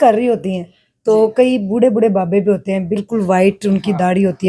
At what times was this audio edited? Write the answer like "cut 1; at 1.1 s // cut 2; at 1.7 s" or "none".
none